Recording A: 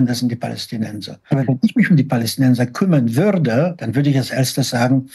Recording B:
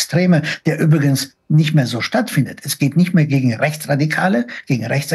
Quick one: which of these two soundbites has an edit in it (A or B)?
A